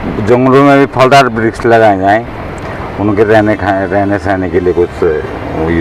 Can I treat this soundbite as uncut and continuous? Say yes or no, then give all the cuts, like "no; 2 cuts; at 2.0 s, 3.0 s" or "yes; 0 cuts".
yes; 0 cuts